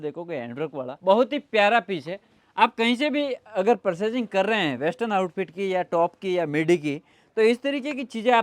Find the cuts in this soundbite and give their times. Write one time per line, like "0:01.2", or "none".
0:00.9